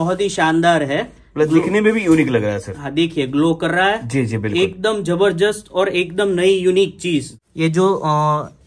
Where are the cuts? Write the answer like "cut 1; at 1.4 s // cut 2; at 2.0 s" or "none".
cut 1; at 7.4 s